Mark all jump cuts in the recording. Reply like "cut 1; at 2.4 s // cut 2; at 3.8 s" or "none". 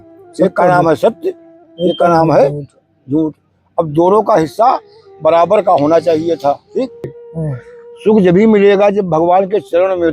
cut 1; at 7.1 s